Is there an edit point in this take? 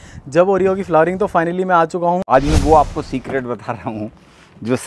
yes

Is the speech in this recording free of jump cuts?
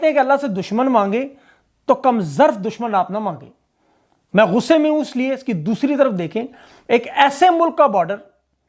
yes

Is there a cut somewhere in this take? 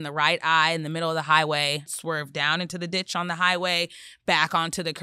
yes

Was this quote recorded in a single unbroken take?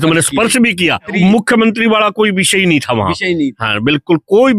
no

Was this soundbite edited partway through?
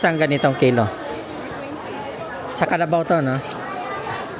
no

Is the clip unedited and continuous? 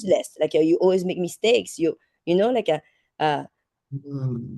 yes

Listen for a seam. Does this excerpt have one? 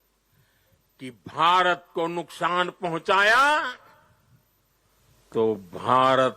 yes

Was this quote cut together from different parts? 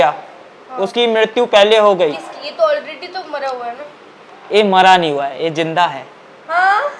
no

